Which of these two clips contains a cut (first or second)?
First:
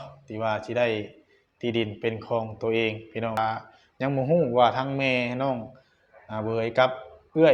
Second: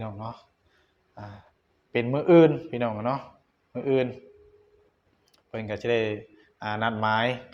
first